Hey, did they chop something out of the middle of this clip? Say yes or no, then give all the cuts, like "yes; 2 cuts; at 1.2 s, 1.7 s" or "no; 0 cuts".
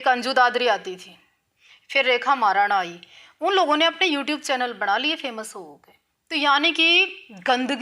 no; 0 cuts